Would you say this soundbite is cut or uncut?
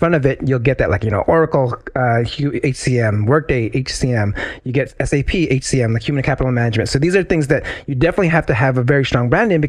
uncut